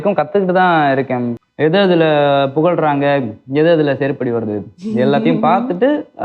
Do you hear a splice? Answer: yes; 1 cut; at 1.4 s

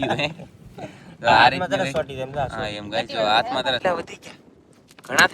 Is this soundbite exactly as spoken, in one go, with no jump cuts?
no; 1 cut; at 3.8 s

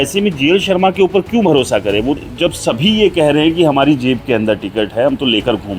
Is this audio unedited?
no; 1 cut; at 2.2 s

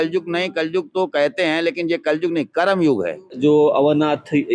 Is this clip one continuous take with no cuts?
no; 1 cut; at 3.2 s

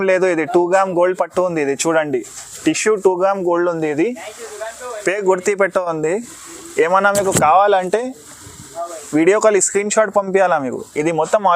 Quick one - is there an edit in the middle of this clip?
no; 0 cuts

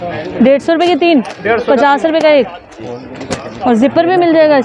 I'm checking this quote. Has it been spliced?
no; 0 cuts

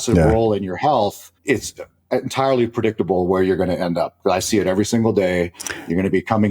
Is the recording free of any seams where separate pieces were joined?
no; 1 cut; at 1.3 s

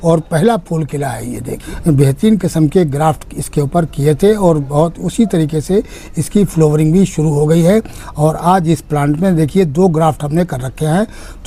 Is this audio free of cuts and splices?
yes; 0 cuts

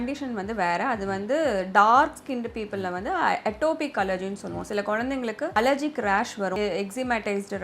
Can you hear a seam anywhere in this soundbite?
yes; 2 cuts; at 5.5 s, 6.6 s

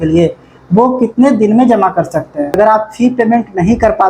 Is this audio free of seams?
no; 1 cut; at 2.5 s

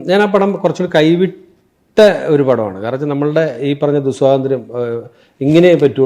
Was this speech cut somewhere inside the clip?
no; 0 cuts

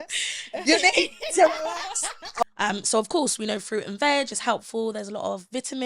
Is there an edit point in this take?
yes; 1 cut; at 2.4 s

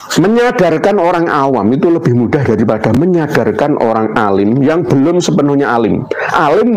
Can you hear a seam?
no; 0 cuts

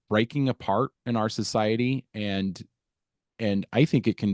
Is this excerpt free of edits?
yes; 0 cuts

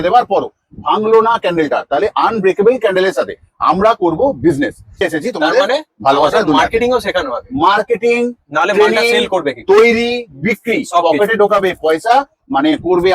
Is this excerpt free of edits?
no; 1 cut; at 5.0 s

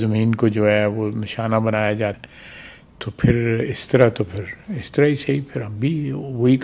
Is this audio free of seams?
no; 1 cut; at 2.2 s

